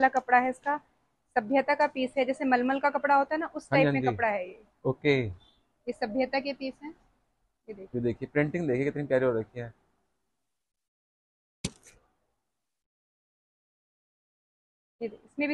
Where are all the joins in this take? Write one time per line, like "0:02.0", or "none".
none